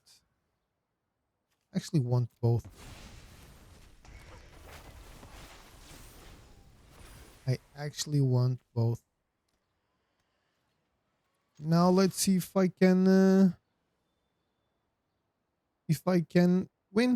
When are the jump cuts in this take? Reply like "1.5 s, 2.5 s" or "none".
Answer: none

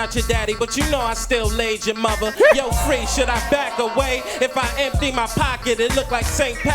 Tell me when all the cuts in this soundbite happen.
none

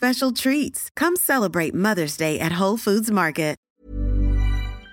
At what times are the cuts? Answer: 3.7 s

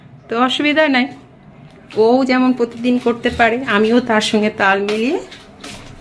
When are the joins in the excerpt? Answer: none

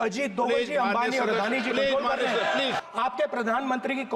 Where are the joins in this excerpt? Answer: 2.8 s

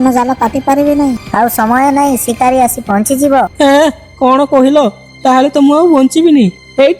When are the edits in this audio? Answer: none

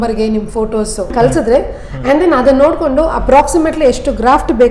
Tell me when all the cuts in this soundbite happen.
1.1 s

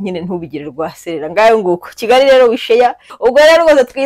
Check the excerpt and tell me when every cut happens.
3.1 s

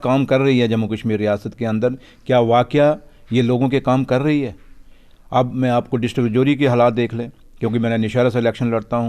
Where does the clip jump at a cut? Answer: none

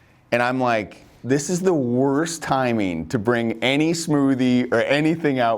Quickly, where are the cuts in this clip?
1.1 s

